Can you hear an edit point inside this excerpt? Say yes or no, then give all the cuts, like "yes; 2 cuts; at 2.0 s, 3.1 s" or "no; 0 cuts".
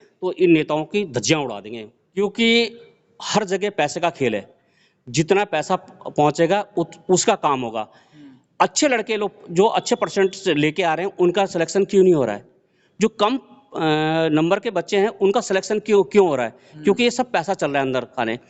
yes; 1 cut; at 2.2 s